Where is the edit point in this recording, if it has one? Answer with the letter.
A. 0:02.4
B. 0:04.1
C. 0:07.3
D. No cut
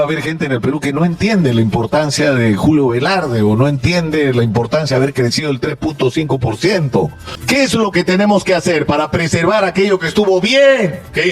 C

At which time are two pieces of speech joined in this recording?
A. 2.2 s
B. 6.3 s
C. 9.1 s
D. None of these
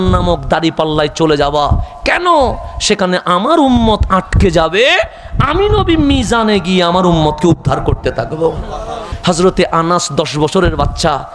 C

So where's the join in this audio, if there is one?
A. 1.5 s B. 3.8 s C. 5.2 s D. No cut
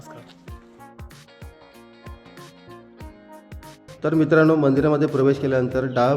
B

